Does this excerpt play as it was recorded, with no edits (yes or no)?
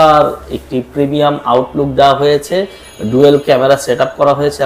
yes